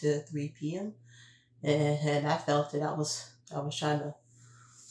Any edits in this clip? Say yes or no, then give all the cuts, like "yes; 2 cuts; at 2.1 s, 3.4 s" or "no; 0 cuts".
no; 0 cuts